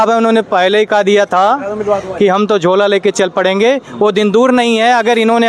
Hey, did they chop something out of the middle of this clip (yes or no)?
no